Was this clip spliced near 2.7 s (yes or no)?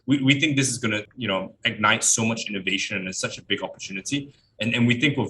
no